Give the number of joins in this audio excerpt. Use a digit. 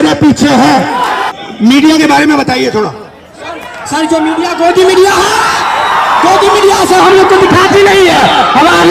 1